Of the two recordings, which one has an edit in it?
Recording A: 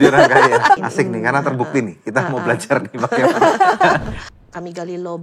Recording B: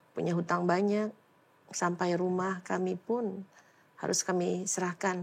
A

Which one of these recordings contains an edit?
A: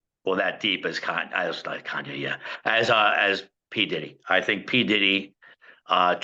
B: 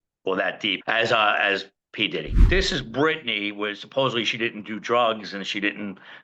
B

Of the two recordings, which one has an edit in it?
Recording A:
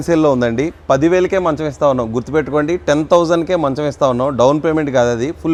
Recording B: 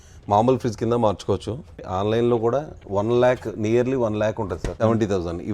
B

